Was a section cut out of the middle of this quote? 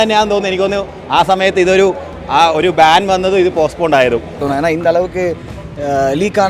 yes; 1 cut; at 4.4 s

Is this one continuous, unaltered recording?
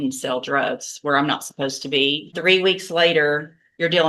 no; 1 cut; at 2.3 s

